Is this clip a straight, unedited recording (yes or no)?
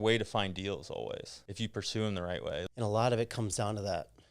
no